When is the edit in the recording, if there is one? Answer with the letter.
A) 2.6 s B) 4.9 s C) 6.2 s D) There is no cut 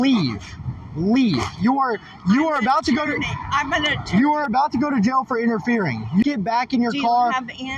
C